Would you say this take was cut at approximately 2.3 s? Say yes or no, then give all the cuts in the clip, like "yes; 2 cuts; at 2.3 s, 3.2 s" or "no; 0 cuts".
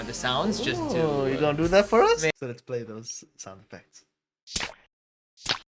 yes; 1 cut; at 2.3 s